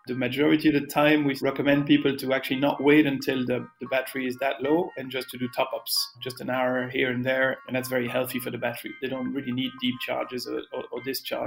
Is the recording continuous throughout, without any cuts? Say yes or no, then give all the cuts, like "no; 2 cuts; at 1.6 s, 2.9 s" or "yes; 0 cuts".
no; 4 cuts; at 1.4 s, 6.2 s, 7.6 s, 8.9 s